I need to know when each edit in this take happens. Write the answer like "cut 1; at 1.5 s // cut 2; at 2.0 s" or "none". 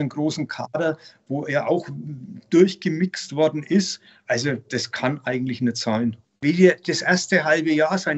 cut 1; at 6.3 s

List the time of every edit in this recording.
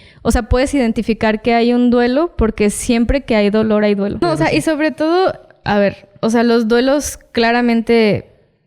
cut 1; at 4.2 s

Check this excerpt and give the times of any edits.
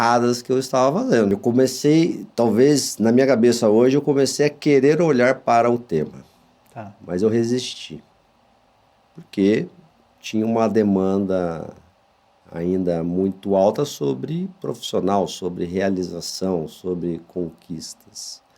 cut 1; at 1.3 s

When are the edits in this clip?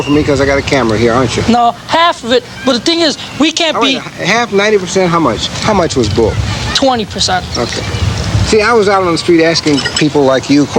none

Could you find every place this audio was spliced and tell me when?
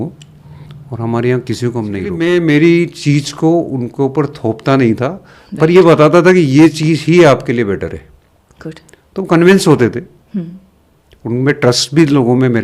cut 1; at 2.1 s

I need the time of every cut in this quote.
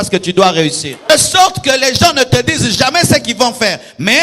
cut 1; at 1.1 s

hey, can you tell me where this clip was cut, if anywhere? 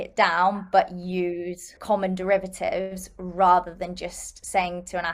cut 1; at 1.8 s

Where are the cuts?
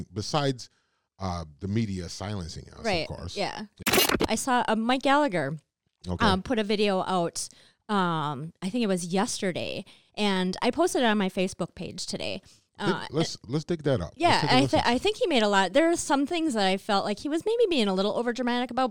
cut 1; at 3.8 s

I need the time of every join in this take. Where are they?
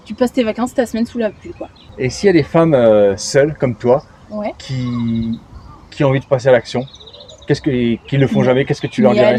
none

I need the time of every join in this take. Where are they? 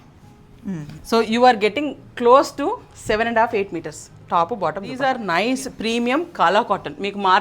cut 1; at 4.9 s

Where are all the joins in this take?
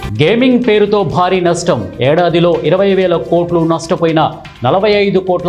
none

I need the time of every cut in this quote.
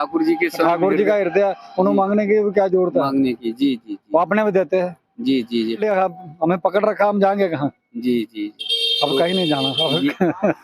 cut 1; at 5.8 s

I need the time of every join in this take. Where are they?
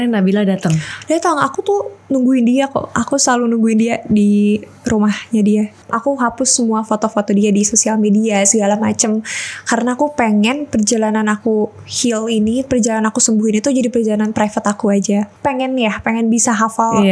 cut 1; at 5.8 s // cut 2; at 15.3 s

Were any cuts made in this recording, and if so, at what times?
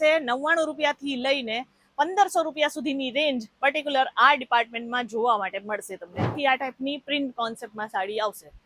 cut 1; at 6.3 s

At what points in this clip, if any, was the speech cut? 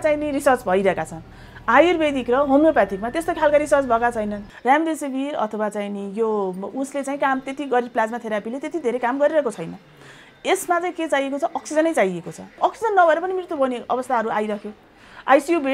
cut 1; at 4.5 s // cut 2; at 12.5 s

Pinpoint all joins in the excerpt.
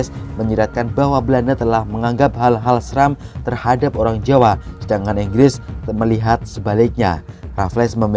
none

